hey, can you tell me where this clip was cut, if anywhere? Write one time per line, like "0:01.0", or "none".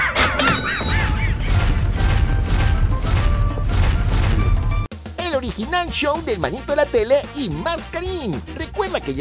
0:04.7